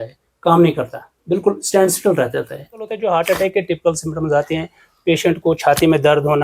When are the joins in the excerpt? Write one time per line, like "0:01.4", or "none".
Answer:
0:02.9